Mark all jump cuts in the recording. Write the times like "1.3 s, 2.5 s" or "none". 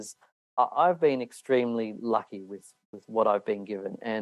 none